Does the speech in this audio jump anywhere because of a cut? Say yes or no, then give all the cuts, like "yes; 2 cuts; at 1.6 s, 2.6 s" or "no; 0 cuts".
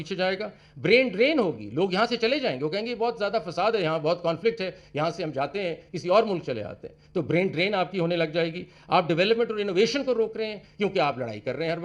no; 0 cuts